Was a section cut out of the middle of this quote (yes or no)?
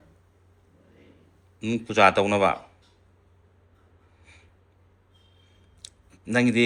no